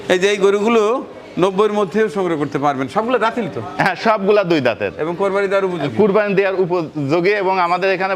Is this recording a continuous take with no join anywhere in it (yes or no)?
yes